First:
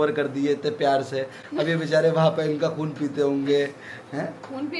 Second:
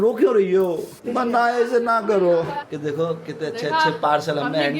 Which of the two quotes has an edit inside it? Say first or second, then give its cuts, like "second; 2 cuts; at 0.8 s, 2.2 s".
second; 2 cuts; at 0.9 s, 2.6 s